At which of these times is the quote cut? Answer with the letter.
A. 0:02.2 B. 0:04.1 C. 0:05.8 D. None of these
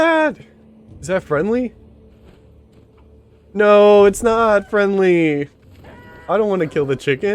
D